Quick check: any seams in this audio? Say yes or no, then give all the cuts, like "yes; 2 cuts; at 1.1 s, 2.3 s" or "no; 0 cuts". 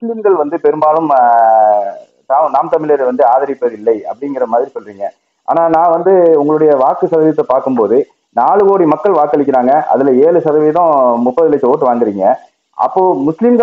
no; 0 cuts